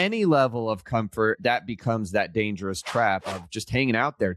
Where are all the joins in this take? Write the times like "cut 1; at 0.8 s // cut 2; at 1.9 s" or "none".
cut 1; at 1.4 s // cut 2; at 3.3 s